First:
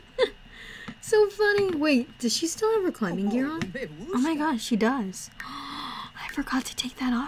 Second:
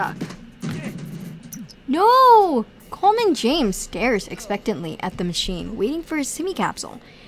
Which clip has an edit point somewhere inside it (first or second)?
second